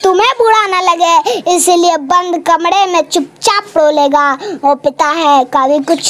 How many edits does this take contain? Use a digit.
0